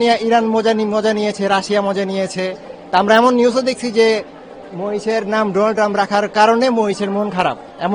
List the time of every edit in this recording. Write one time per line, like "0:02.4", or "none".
none